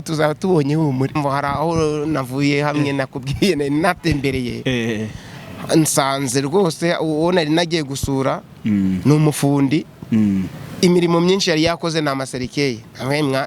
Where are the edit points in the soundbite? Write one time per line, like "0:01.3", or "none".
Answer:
0:01.1